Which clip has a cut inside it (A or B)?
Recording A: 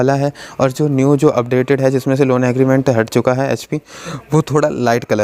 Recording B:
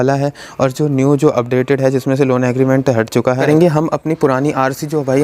B